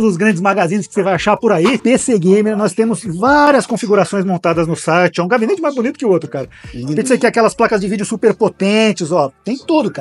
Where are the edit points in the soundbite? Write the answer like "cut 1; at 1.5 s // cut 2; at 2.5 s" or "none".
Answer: cut 1; at 1.8 s